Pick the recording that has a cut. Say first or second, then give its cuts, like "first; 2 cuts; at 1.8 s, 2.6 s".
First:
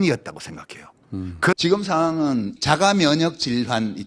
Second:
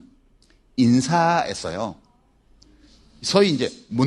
first; 1 cut; at 1.6 s